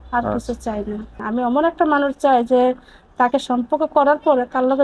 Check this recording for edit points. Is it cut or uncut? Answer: cut